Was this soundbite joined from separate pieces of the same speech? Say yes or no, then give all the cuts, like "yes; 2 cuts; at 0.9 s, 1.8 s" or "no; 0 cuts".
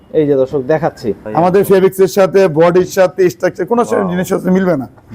yes; 1 cut; at 1.1 s